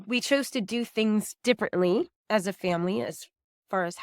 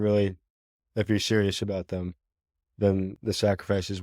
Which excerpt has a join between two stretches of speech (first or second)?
first